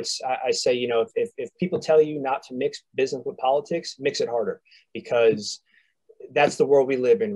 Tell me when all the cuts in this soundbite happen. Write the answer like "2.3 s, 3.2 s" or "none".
none